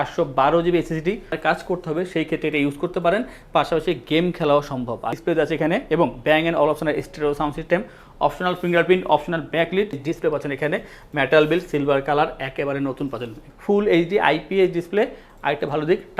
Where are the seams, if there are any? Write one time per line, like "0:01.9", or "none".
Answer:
0:01.4
0:05.1
0:09.9
0:13.5